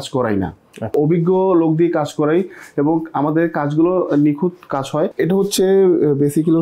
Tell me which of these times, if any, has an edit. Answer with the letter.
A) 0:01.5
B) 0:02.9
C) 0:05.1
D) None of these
C